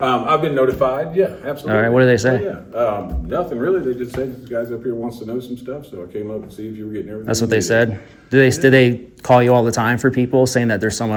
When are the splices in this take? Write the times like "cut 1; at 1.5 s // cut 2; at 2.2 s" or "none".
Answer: none

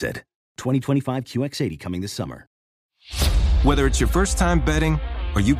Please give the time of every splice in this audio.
cut 1; at 2.6 s

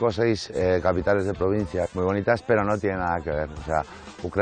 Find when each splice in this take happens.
cut 1; at 1.9 s

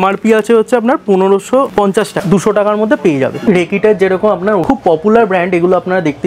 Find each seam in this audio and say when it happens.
cut 1; at 2.1 s // cut 2; at 3.4 s // cut 3; at 4.6 s

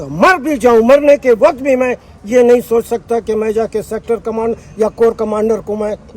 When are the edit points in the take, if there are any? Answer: none

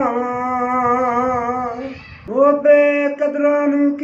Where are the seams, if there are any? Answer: cut 1; at 2.1 s

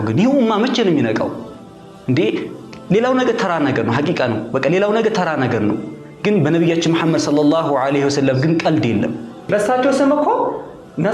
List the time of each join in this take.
cut 1; at 9.5 s

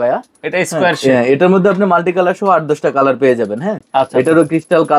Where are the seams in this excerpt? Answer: none

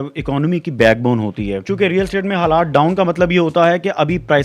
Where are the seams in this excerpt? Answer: cut 1; at 1.7 s

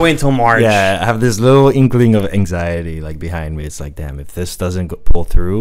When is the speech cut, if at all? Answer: none

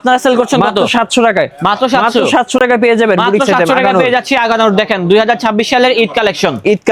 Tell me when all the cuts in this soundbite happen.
none

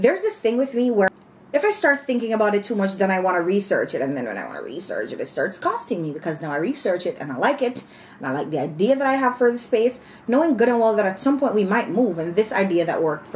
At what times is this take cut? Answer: cut 1; at 1.1 s

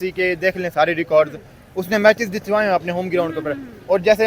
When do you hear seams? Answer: none

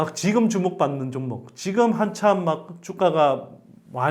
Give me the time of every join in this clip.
none

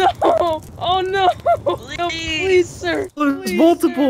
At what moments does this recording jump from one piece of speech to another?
cut 1; at 1.9 s // cut 2; at 3.1 s

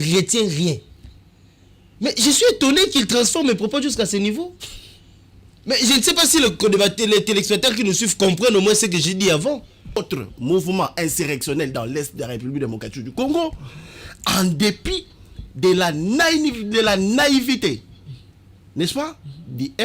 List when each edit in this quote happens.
cut 1; at 10.0 s

